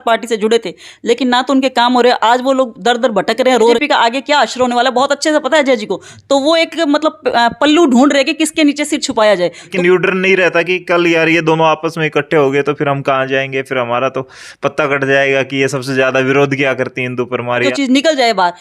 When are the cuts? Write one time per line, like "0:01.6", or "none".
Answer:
0:03.8
0:09.7
0:17.7